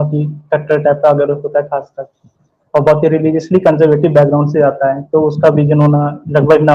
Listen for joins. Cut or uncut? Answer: uncut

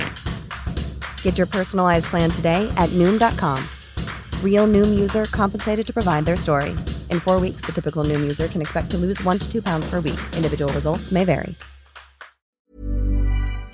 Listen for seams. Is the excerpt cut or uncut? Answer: cut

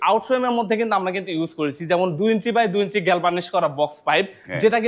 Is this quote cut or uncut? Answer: uncut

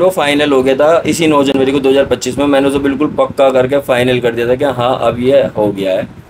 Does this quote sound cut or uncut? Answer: uncut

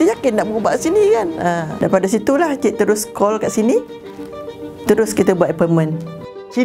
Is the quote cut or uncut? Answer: uncut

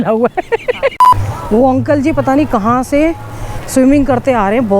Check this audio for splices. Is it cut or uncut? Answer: cut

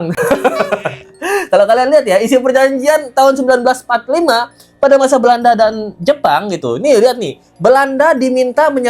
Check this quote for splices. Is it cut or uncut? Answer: uncut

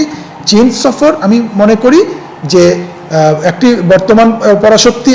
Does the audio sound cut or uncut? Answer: uncut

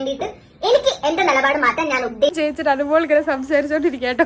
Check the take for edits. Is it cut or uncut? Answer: cut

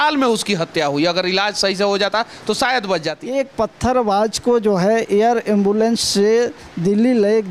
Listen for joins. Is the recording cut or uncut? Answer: cut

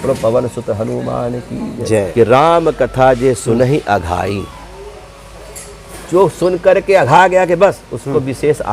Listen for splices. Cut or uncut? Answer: cut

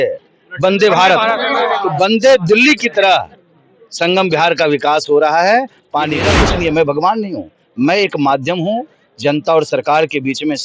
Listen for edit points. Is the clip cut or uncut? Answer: cut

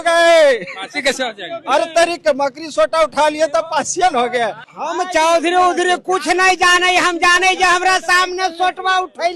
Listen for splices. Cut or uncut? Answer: cut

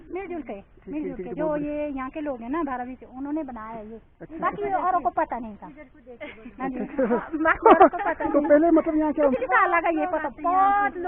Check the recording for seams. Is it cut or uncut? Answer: cut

